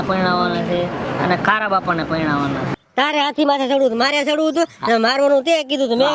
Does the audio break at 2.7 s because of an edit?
yes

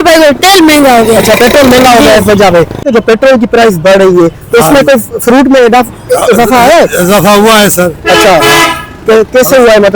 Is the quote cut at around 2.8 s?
yes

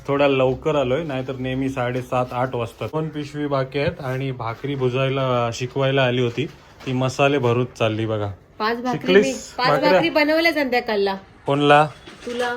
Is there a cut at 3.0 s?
yes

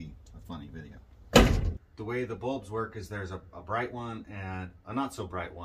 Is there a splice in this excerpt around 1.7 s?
yes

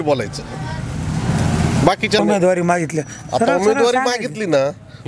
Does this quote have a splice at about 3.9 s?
no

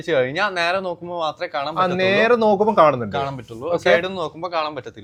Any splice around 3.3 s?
no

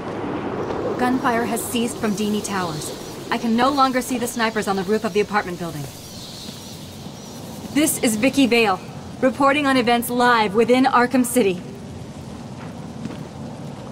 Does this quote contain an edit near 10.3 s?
yes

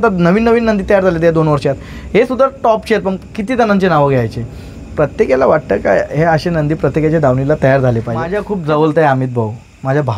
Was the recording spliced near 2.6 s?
no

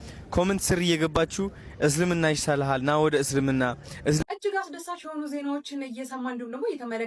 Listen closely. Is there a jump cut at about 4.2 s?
yes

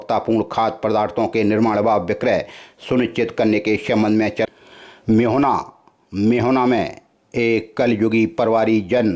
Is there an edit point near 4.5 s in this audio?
yes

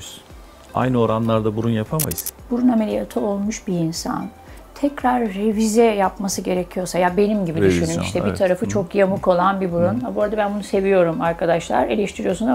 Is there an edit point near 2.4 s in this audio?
yes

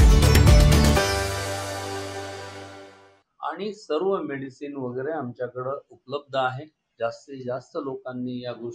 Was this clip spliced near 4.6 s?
no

